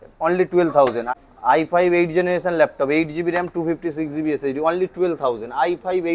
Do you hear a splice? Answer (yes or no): yes